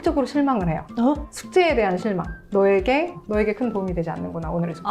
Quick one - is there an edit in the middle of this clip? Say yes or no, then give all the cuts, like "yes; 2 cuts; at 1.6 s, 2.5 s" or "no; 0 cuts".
yes; 2 cuts; at 1.3 s, 2.4 s